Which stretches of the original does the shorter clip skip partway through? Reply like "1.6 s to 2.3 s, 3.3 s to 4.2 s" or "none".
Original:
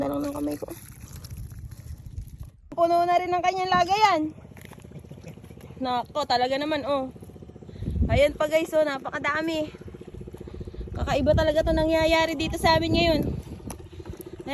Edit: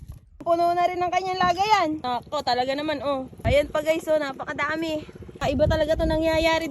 4.3 s to 5.9 s, 7.2 s to 8.0 s, 9.9 s to 10.9 s